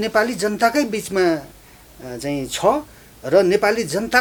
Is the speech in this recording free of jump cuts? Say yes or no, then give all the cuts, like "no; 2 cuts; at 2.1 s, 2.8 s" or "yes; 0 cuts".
yes; 0 cuts